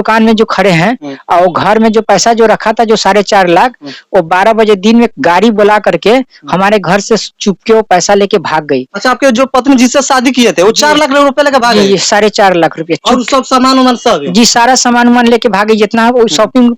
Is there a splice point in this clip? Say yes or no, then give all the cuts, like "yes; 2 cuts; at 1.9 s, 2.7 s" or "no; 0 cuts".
no; 0 cuts